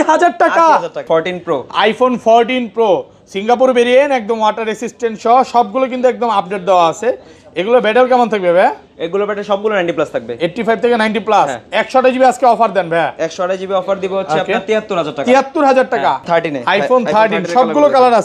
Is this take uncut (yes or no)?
no